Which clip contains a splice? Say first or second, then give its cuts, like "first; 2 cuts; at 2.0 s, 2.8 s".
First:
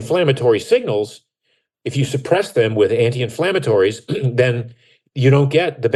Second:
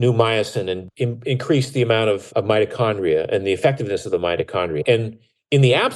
second; 3 cuts; at 0.8 s, 2.2 s, 4.8 s